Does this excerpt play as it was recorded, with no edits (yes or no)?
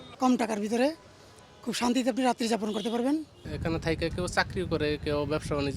no